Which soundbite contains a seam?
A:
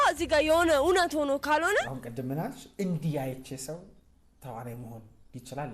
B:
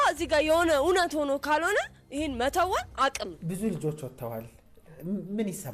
A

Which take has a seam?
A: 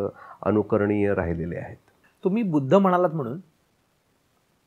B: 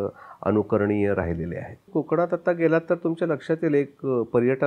B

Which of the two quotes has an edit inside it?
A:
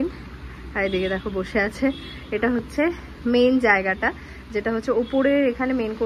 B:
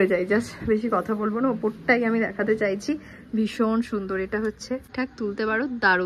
B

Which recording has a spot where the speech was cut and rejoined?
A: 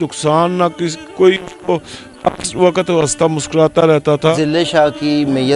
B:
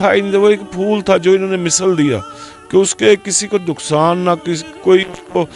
A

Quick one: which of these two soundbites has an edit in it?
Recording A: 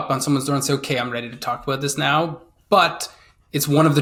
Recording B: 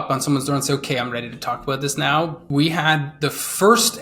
B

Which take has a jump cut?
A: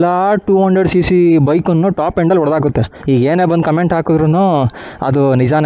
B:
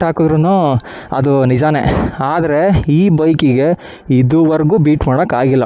A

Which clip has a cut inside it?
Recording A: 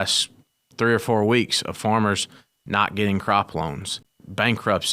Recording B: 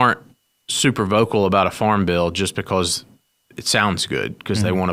A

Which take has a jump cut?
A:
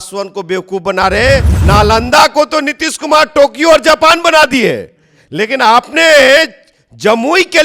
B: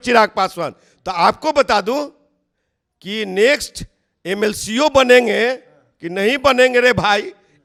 A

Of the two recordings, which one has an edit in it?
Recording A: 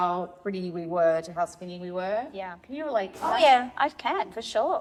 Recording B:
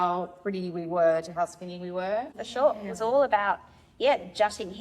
B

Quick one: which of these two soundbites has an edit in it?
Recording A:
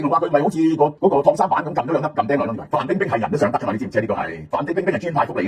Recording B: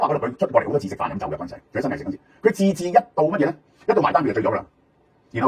A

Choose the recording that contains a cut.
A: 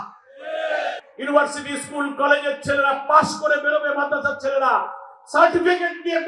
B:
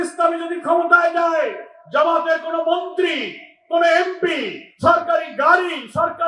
A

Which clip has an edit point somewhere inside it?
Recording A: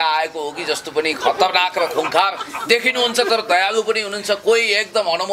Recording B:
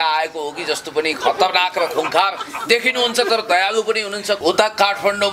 B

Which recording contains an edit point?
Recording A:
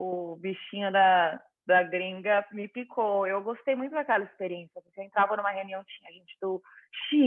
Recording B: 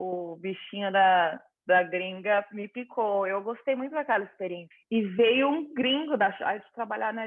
B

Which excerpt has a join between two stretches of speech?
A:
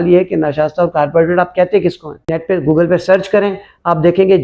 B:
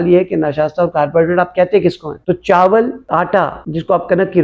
A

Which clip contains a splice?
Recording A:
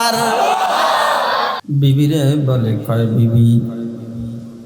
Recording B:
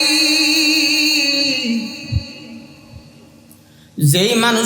A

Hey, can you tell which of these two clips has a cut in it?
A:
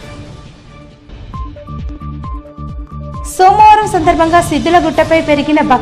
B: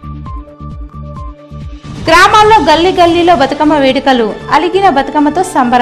A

